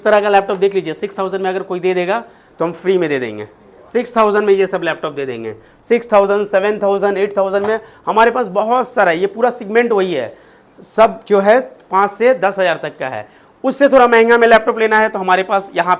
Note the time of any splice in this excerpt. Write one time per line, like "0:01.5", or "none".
none